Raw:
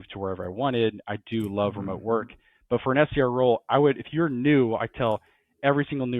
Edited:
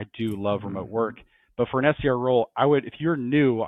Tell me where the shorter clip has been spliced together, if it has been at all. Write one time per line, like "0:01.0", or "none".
none